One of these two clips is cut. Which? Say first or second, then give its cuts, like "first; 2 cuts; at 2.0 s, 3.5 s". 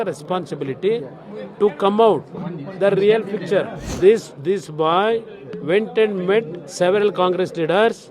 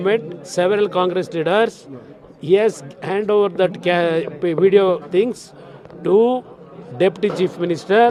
first; 1 cut; at 3.8 s